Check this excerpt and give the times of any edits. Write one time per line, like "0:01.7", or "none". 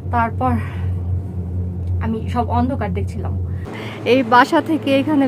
0:03.8